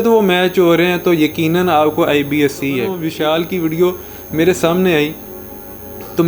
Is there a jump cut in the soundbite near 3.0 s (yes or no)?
yes